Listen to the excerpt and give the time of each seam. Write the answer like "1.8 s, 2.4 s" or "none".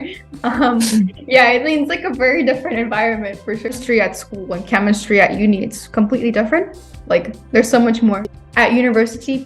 3.7 s, 8.3 s